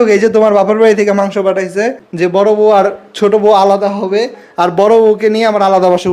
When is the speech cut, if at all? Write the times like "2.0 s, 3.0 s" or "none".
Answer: 2.0 s